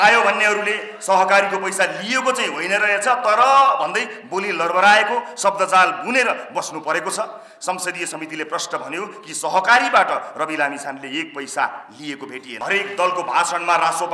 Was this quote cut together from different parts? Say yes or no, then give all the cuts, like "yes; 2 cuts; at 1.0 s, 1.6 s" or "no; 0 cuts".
yes; 1 cut; at 12.4 s